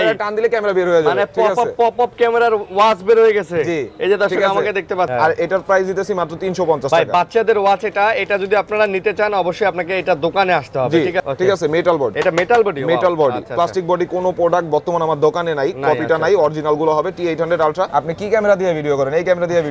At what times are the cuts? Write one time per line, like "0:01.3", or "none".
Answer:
0:05.1
0:11.2
0:12.2
0:17.9